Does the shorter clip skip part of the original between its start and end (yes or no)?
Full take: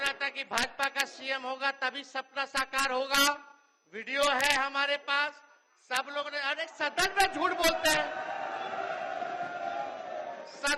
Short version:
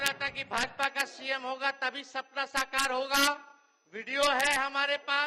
no